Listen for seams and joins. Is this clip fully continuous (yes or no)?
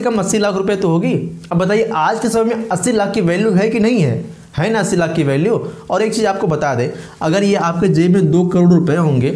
yes